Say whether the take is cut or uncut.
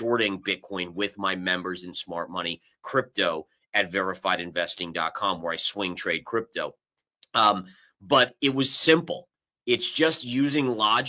uncut